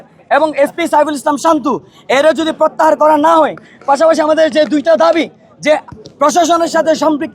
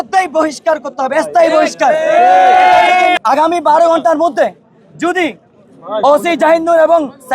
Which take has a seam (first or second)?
second